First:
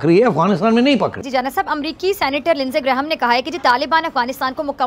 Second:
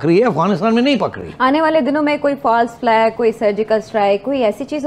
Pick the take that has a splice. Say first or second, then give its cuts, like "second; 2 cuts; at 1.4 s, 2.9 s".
first; 1 cut; at 1.2 s